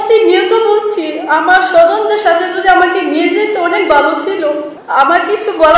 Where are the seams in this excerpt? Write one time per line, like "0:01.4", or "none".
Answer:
0:04.7